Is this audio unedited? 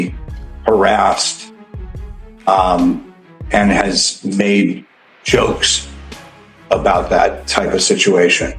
yes; 0 cuts

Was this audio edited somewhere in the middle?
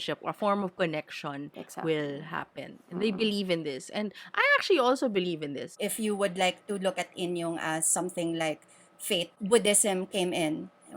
yes; 2 cuts; at 5.7 s, 9.4 s

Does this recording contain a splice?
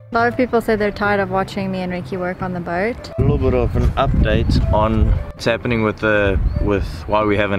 yes; 2 cuts; at 3.1 s, 5.4 s

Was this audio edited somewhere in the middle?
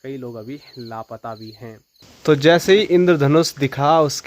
yes; 1 cut; at 2.1 s

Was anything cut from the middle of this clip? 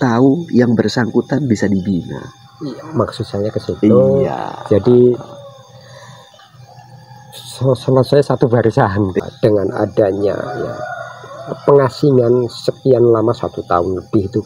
yes; 1 cut; at 9.1 s

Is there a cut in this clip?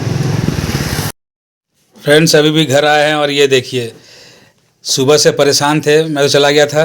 yes; 1 cut; at 1.2 s

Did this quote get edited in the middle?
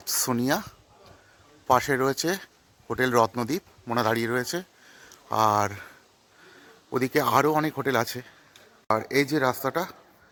no; 0 cuts

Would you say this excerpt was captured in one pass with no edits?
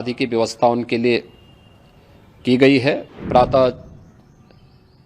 no; 1 cut; at 3.1 s

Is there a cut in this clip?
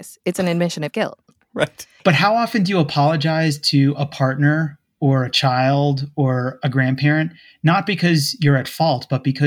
yes; 1 cut; at 1.9 s

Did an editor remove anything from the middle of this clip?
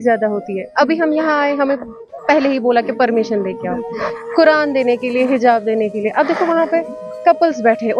no; 0 cuts

